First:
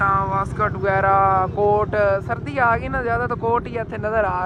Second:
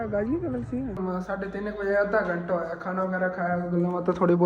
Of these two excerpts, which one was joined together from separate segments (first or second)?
second